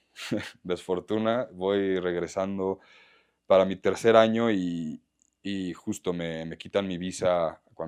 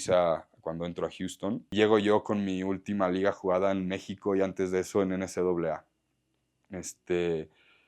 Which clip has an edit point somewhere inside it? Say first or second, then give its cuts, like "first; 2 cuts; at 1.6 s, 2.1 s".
second; 1 cut; at 1.7 s